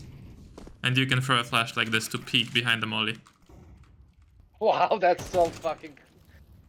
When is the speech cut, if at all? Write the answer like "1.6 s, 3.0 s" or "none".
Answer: none